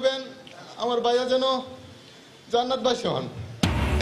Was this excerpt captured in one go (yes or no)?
yes